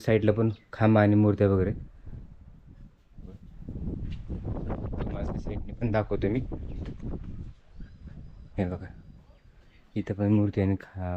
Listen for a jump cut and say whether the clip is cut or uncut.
uncut